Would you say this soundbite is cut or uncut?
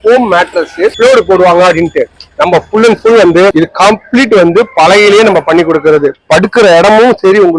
cut